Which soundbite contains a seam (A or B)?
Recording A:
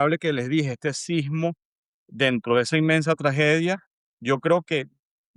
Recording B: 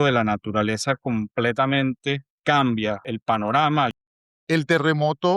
B